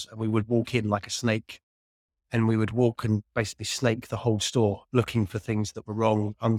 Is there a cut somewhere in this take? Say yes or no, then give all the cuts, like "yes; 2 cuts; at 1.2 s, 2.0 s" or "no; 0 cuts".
no; 0 cuts